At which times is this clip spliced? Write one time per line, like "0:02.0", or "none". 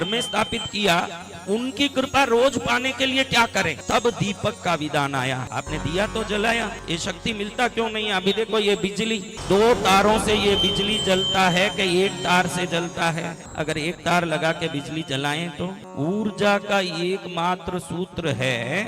0:03.8
0:05.4
0:06.8
0:09.3
0:13.4
0:15.8